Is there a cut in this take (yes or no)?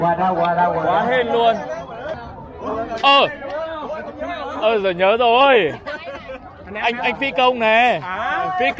yes